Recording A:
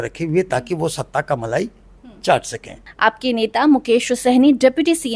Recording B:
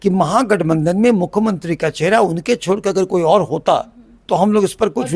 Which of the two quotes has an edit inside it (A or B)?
A